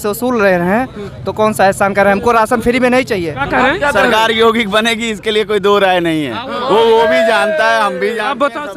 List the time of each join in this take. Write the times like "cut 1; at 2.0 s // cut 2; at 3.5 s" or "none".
cut 1; at 3.4 s